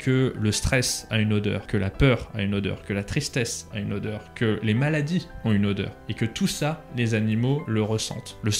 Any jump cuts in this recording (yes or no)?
yes